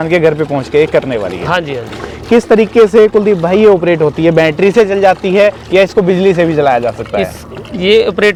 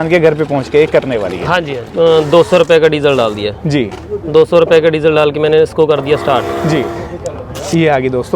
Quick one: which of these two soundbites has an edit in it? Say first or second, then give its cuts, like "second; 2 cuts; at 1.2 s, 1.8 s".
second; 2 cuts; at 1.8 s, 6.9 s